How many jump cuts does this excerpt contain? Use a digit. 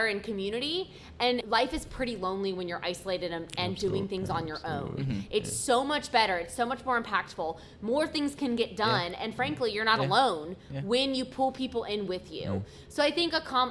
1